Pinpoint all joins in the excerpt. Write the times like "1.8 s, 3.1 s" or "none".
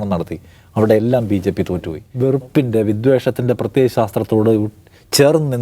2.0 s